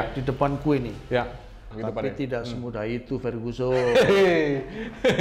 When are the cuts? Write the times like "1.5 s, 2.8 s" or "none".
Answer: 1.7 s